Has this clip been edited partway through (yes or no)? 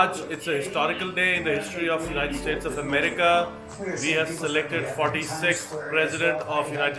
no